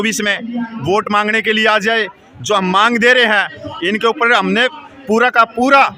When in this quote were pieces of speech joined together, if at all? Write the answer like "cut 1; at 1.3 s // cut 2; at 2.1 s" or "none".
none